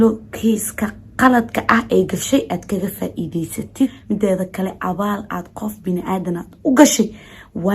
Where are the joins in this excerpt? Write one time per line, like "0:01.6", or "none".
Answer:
0:04.0